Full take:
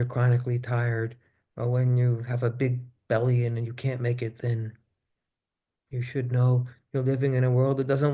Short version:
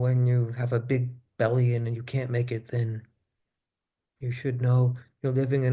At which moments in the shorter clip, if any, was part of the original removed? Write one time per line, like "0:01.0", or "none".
none